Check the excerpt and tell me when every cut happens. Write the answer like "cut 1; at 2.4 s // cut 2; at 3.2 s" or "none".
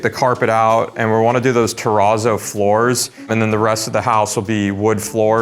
none